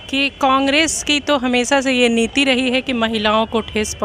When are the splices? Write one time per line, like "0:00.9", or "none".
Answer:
none